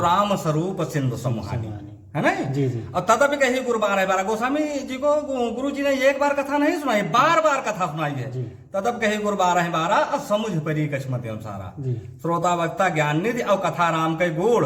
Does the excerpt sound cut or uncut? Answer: uncut